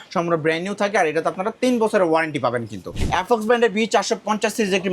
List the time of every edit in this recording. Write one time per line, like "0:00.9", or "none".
0:02.9